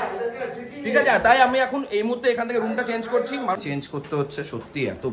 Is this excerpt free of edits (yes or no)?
no